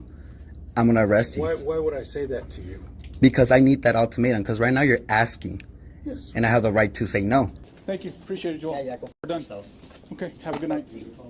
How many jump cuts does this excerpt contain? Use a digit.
1